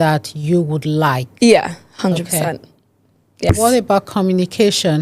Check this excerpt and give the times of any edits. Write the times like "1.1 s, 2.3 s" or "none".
3.5 s

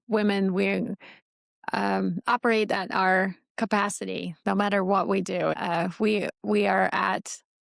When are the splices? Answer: 5.6 s

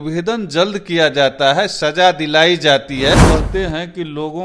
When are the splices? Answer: 3.2 s

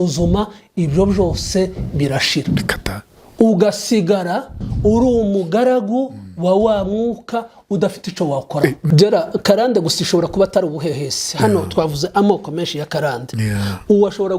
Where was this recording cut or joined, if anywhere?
8.8 s

